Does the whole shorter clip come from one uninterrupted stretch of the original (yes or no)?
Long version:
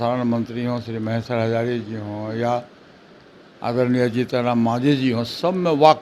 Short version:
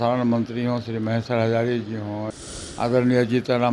no